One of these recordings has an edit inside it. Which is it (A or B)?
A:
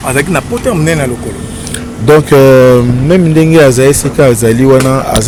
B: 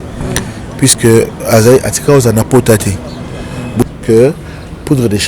B